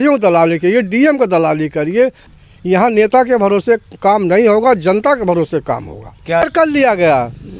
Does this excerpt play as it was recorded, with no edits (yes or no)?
no